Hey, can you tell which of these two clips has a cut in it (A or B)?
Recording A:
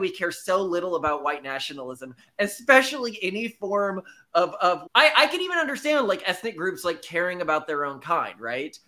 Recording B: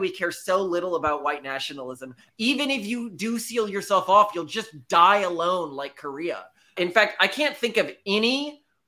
B